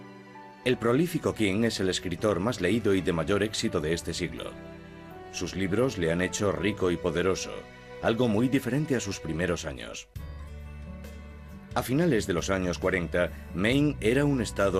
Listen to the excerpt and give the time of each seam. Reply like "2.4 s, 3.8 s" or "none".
none